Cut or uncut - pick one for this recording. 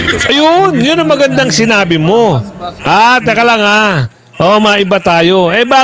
uncut